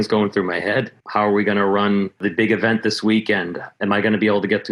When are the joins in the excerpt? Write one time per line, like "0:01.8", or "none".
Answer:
0:01.0
0:02.2